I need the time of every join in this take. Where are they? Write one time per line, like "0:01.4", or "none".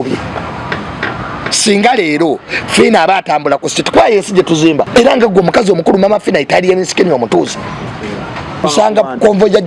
0:04.9
0:08.6